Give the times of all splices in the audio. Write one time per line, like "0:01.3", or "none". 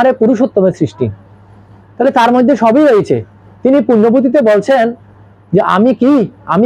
none